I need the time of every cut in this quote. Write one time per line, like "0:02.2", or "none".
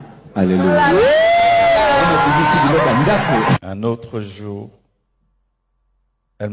0:03.6